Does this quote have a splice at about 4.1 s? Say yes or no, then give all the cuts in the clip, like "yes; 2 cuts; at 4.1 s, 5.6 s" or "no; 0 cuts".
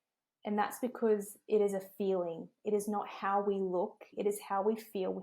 yes; 1 cut; at 4.1 s